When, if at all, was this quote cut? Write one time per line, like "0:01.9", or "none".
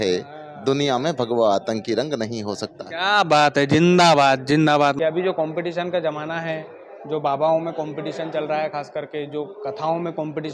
0:05.0